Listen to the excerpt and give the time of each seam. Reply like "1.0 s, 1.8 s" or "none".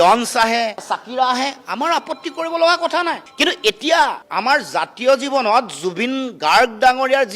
0.8 s, 3.2 s